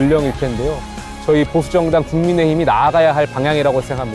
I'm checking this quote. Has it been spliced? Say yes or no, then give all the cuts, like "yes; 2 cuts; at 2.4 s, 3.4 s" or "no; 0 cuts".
yes; 1 cut; at 1.0 s